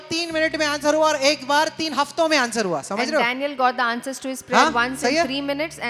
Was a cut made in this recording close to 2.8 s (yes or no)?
no